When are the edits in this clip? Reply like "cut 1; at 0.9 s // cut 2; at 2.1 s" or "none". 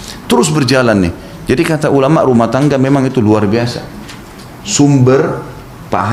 none

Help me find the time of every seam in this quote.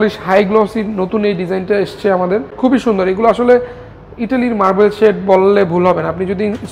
cut 1; at 2.5 s

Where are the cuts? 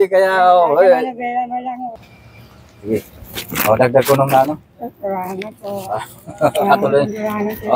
cut 1; at 1.9 s

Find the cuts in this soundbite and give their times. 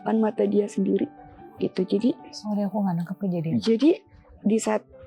none

